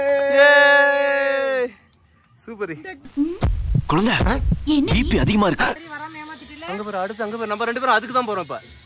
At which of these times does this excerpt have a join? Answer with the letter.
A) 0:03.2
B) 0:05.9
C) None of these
B